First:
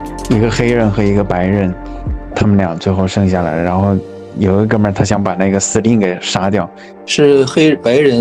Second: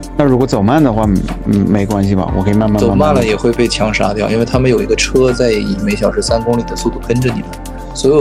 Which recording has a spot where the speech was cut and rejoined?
first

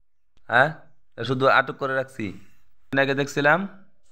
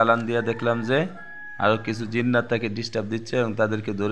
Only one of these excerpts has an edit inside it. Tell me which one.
first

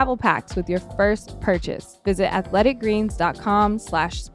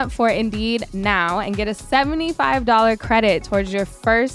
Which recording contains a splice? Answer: first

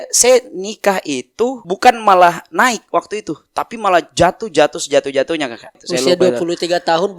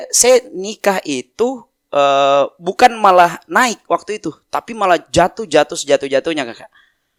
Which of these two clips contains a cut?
first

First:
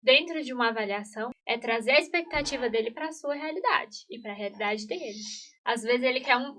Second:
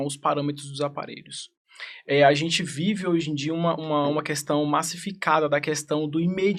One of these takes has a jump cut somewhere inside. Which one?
first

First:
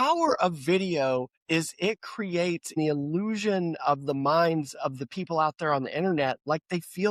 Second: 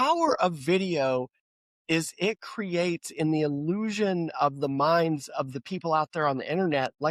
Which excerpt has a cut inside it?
first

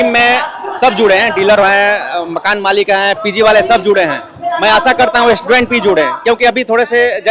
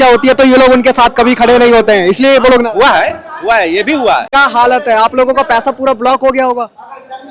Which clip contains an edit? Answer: second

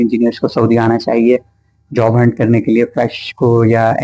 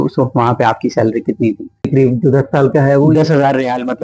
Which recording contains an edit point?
second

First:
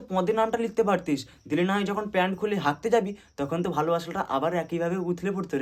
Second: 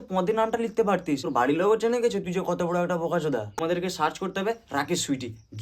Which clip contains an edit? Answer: second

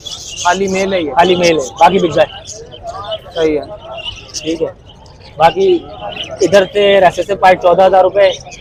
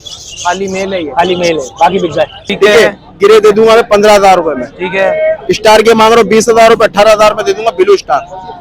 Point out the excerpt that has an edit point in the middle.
second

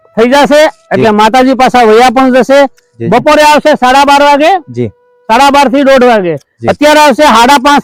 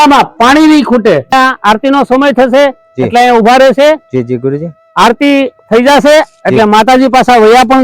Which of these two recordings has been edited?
second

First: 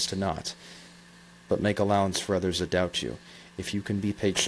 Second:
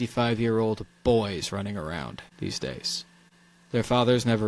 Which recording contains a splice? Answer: second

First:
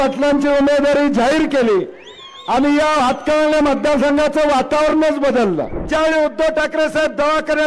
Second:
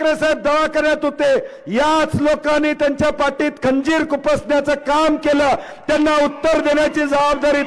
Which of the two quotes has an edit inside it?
first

